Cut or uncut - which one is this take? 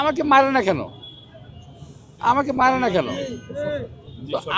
uncut